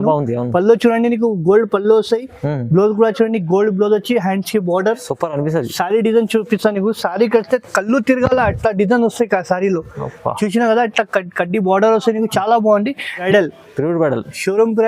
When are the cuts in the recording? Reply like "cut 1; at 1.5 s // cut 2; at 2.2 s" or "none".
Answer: cut 1; at 13.2 s